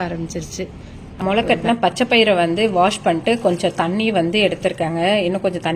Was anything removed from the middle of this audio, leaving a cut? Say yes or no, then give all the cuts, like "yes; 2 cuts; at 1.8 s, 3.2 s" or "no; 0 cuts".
yes; 1 cut; at 1.1 s